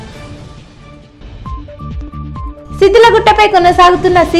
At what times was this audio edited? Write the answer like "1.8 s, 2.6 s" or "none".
none